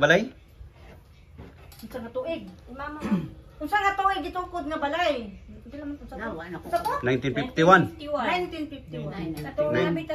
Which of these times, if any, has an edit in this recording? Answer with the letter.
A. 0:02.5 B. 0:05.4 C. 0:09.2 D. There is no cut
D